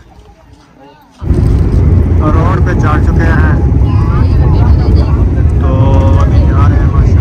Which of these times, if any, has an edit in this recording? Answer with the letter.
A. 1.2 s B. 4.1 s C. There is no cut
A